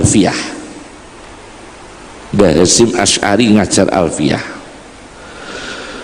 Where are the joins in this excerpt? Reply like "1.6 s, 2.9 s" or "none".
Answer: none